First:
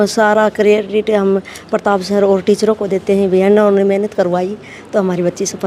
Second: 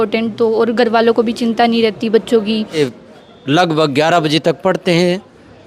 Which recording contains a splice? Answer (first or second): second